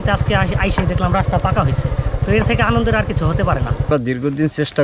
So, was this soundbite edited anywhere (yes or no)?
yes